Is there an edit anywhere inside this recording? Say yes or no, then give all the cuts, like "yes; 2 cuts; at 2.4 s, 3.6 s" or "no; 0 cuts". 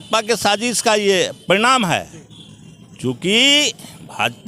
no; 0 cuts